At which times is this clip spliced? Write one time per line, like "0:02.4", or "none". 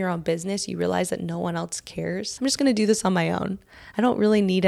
0:02.3